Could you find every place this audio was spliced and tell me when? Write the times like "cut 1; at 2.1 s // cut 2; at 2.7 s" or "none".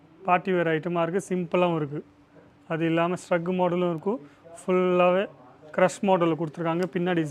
none